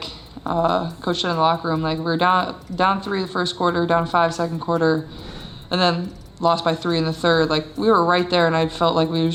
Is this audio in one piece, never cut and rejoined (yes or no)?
yes